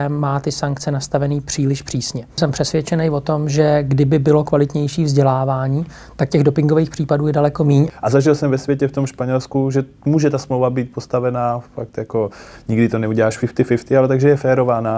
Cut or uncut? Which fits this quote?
cut